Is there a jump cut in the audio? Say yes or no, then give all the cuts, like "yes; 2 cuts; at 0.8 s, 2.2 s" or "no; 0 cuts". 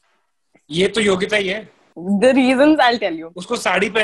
yes; 1 cut; at 2.0 s